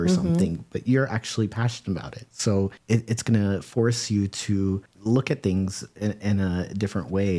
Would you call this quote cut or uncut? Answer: cut